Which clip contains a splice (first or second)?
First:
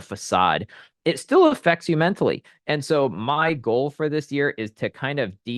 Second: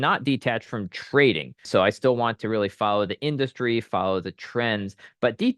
second